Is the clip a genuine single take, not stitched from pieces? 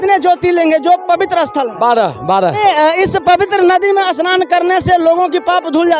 no; 1 cut; at 2.6 s

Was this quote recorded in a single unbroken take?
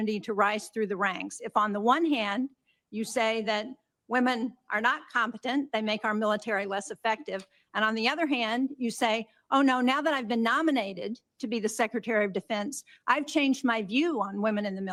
yes; 0 cuts

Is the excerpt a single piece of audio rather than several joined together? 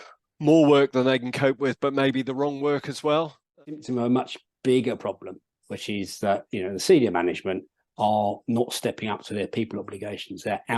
no; 1 cut; at 3.8 s

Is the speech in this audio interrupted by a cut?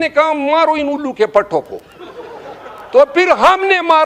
no; 0 cuts

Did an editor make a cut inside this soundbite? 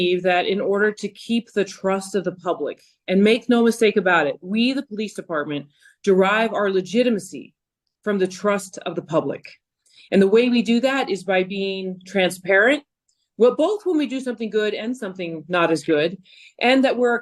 no; 0 cuts

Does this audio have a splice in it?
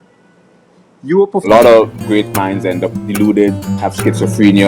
yes; 1 cut; at 1.5 s

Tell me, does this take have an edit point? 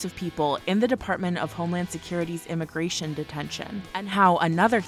yes; 1 cut; at 3.9 s

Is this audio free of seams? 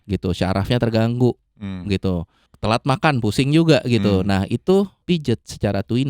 no; 1 cut; at 5.0 s

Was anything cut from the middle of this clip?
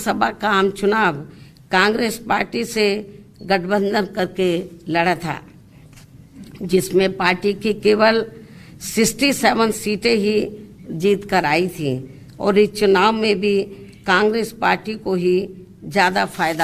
no; 0 cuts

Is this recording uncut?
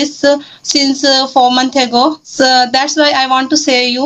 no; 1 cut; at 2.2 s

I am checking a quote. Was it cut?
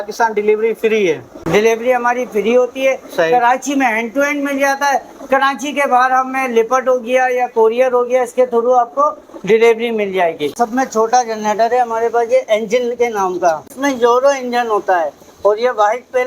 yes; 3 cuts; at 1.3 s, 10.5 s, 13.7 s

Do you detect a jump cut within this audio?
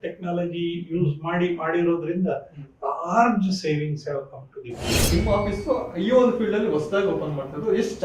yes; 1 cut; at 5.1 s

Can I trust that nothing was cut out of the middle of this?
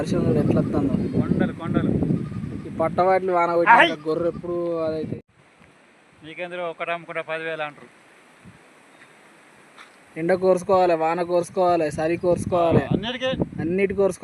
no; 1 cut; at 5.2 s

